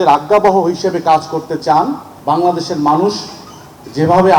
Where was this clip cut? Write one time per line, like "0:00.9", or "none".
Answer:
0:02.1